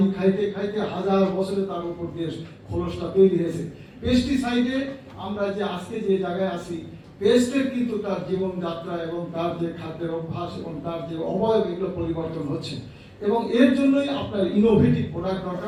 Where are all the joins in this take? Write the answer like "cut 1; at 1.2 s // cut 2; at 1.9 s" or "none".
none

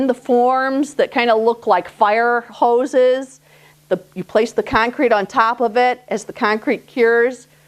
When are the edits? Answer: cut 1; at 1.2 s

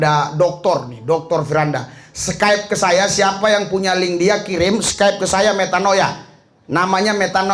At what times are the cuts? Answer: none

